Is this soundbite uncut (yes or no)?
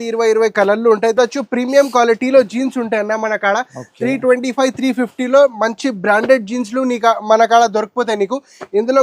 no